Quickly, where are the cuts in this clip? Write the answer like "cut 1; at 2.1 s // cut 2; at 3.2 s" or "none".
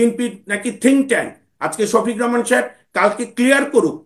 none